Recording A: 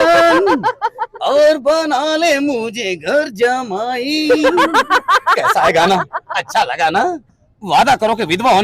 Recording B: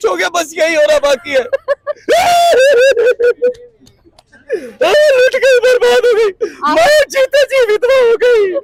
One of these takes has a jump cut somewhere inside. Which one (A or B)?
A